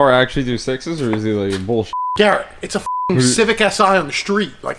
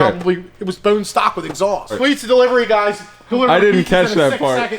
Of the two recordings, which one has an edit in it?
second; 1 cut; at 1.9 s

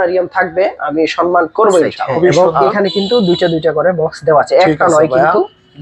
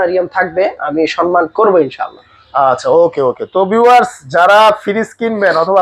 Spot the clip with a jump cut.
first; 1 cut; at 2.1 s

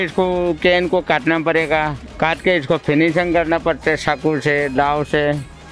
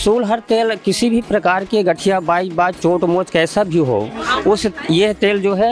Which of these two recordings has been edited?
first; 1 cut; at 2.0 s

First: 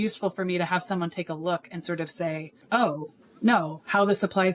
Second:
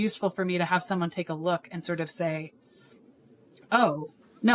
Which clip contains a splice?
first; 1 cut; at 2.5 s

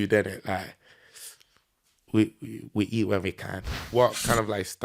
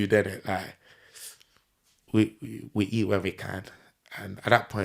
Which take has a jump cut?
first; 1 cut; at 3.9 s

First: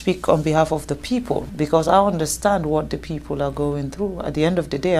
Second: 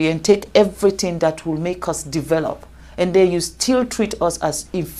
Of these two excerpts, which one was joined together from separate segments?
first; 1 cut; at 1.5 s

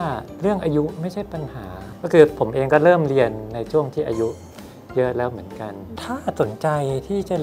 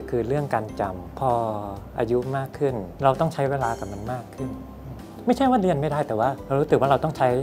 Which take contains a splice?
second; 3 cuts; at 1.2 s, 3.0 s, 6.4 s

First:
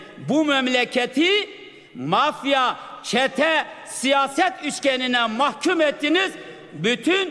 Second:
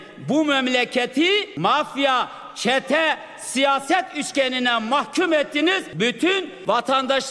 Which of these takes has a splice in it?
second; 2 cuts; at 1.5 s, 6.3 s

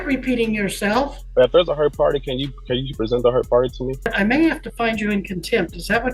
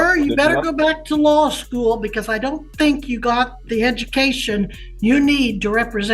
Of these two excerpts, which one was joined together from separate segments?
first; 2 cuts; at 1.2 s, 4.1 s

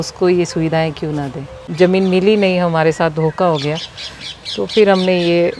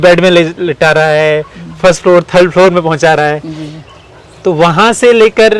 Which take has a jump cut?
first; 1 cut; at 1.6 s

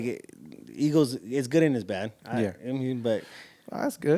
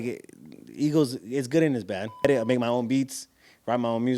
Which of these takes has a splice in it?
second; 1 cut; at 2.2 s

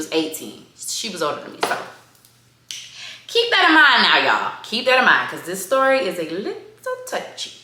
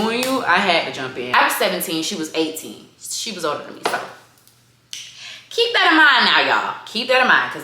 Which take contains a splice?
second; 1 cut; at 1.3 s

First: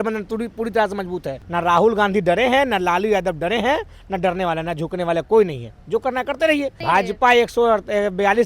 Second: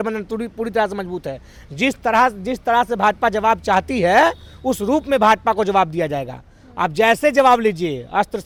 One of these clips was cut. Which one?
first; 2 cuts; at 1.4 s, 6.8 s

